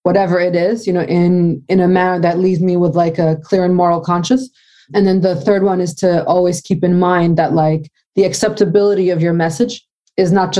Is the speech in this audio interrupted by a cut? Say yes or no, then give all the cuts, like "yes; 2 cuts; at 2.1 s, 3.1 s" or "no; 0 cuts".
no; 0 cuts